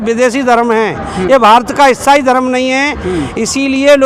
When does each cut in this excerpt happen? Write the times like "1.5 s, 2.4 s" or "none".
none